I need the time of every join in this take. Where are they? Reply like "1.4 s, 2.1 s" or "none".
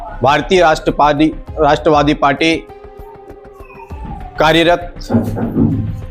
none